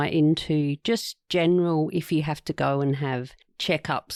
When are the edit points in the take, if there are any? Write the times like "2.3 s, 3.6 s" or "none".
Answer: none